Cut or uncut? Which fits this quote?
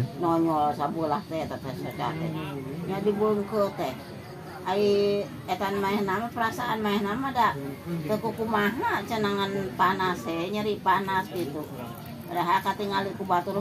uncut